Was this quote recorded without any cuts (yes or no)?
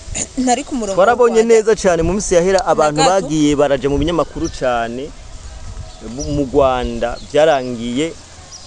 yes